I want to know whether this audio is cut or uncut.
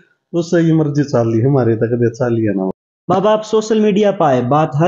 cut